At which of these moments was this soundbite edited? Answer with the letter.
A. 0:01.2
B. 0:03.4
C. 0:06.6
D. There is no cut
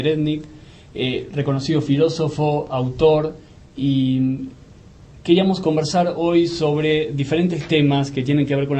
D